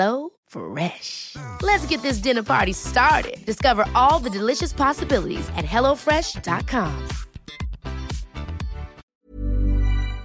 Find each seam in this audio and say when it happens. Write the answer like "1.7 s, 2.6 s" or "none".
9.0 s